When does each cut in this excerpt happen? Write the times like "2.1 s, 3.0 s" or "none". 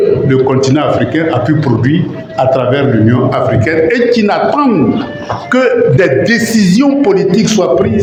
none

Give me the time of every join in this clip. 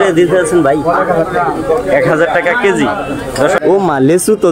3.6 s

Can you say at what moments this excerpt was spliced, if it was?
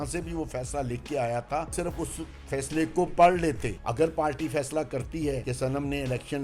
1.7 s, 3.8 s, 5.5 s

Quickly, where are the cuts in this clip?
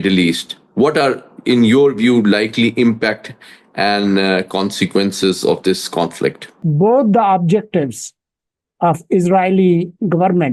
6.6 s

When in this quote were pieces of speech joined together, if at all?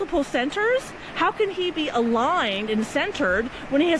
none

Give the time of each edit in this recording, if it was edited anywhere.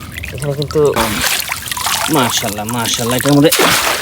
1.0 s

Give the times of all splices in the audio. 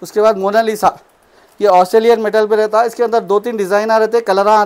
none

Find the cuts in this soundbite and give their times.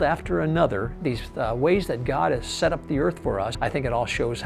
0.9 s, 3.5 s

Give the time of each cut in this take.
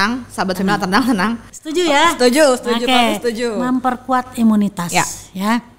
1.5 s

